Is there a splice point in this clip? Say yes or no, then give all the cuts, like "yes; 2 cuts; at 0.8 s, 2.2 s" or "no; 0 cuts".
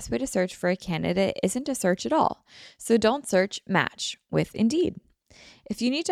no; 0 cuts